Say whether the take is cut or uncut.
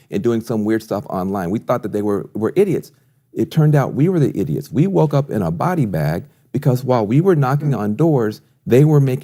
uncut